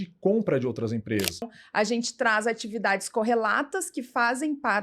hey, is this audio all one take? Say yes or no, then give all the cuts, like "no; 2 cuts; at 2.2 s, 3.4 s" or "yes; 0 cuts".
no; 1 cut; at 1.5 s